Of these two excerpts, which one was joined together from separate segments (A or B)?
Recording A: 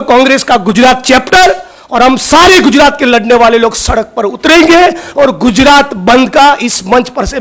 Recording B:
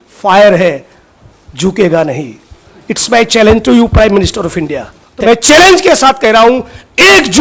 B